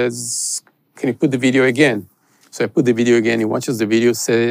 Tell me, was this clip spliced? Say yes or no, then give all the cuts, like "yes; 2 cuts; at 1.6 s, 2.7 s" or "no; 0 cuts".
no; 0 cuts